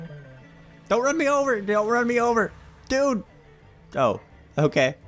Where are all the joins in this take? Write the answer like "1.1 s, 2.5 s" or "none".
none